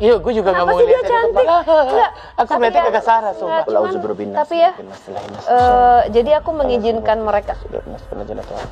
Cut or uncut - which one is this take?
uncut